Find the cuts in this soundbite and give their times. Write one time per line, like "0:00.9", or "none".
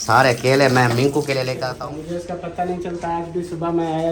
0:01.5